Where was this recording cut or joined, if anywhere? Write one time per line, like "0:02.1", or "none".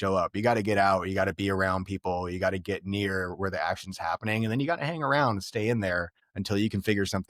none